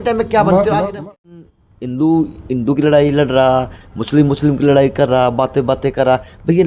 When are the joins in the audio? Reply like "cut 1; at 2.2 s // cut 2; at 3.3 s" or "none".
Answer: cut 1; at 1.5 s

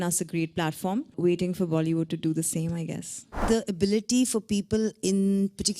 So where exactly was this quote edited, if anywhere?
cut 1; at 1.1 s // cut 2; at 3.4 s

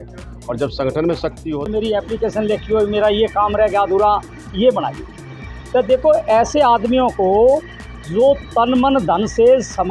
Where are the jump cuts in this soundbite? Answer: cut 1; at 1.7 s

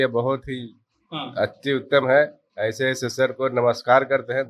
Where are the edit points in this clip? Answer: none

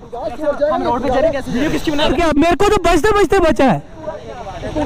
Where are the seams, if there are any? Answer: cut 1; at 2.0 s

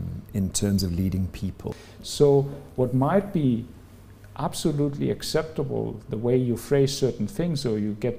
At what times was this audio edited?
cut 1; at 1.6 s

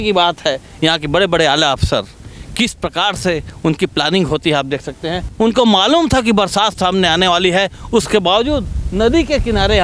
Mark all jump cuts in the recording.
cut 1; at 5.3 s

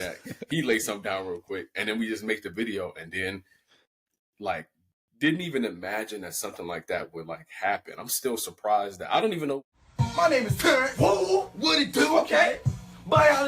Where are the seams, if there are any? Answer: cut 1; at 9.6 s

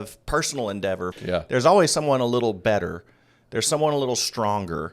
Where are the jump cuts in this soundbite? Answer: cut 1; at 1.1 s

